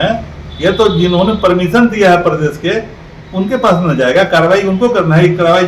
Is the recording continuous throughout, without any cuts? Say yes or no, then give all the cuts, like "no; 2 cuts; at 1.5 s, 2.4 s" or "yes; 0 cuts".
yes; 0 cuts